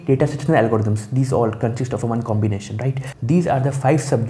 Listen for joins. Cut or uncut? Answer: cut